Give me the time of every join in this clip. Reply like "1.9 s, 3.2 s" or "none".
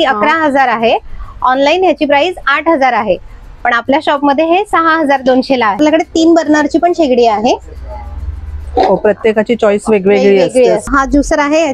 5.8 s, 10.9 s

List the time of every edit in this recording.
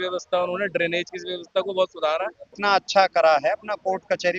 2.5 s

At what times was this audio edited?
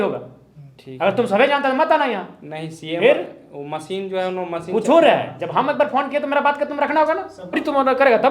7.4 s

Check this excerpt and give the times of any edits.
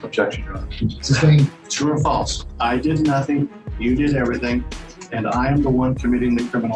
1.6 s

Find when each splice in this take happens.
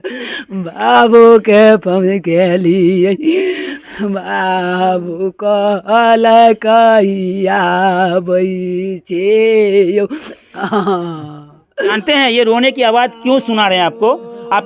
11.9 s

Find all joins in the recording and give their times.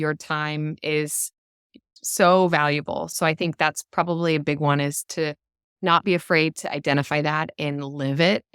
1.9 s, 3.1 s

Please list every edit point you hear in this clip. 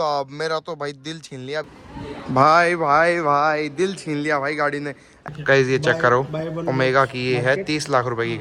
1.7 s, 5.1 s

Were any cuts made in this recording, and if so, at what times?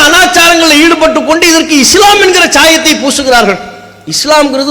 none

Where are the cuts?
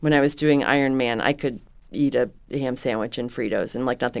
none

